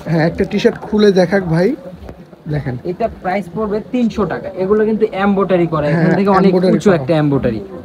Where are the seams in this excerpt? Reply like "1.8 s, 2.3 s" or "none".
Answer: none